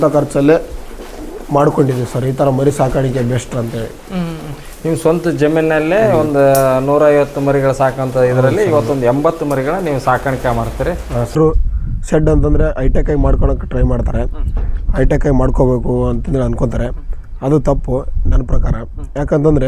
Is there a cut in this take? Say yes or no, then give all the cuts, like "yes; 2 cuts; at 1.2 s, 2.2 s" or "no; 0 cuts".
yes; 1 cut; at 11.3 s